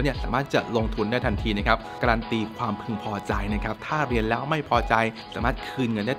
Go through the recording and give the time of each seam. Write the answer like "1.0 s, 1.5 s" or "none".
1.9 s, 5.2 s